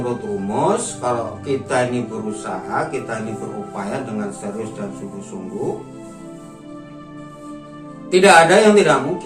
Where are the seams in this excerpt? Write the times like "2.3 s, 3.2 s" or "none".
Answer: none